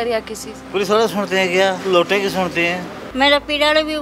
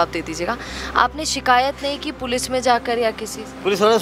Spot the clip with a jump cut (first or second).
first